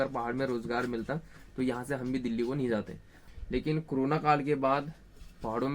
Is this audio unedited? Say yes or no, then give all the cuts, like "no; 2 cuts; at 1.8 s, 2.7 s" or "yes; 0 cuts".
no; 1 cut; at 3.2 s